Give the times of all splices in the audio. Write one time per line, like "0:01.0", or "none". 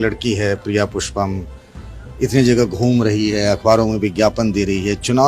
none